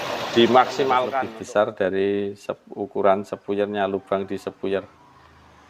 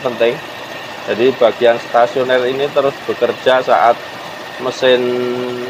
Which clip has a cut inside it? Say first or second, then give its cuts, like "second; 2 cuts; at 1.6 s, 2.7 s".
first; 1 cut; at 1.1 s